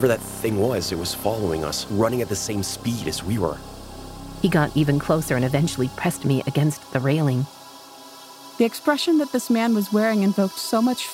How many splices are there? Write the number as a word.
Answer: two